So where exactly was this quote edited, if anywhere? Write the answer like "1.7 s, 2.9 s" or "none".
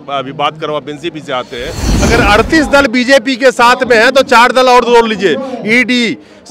1.9 s